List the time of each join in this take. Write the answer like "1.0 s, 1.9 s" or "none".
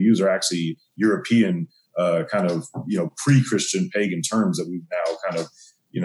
none